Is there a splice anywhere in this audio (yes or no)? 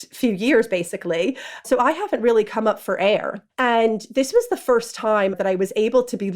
yes